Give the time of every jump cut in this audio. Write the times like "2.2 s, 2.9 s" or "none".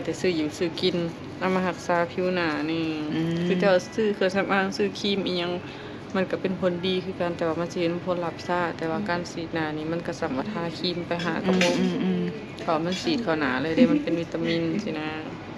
none